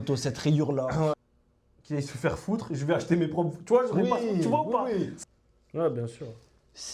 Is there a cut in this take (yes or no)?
yes